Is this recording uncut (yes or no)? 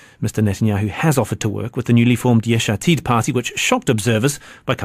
no